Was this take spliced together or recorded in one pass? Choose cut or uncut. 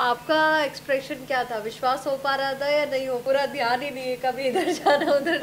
cut